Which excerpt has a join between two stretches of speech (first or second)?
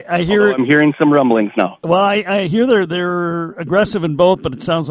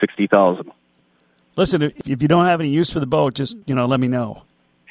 second